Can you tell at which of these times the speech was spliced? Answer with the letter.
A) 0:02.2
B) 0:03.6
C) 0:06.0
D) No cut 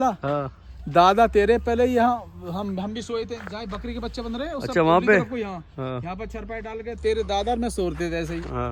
D